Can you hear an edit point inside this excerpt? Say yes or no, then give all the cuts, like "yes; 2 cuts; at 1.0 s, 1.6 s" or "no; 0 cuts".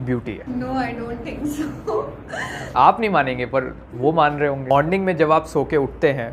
yes; 1 cut; at 4.7 s